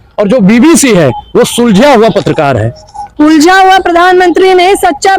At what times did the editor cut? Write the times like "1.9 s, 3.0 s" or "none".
none